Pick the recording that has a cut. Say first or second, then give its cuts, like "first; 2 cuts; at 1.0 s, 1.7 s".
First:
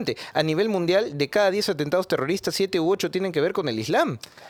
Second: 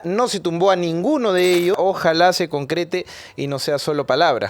second; 1 cut; at 1.8 s